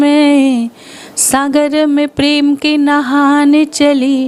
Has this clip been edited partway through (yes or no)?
no